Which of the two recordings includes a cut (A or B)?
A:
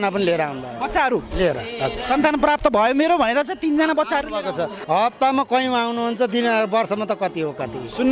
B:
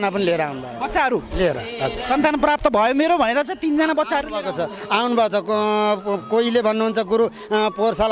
A